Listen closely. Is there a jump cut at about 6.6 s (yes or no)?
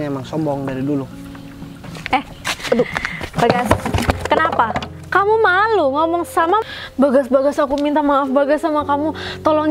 yes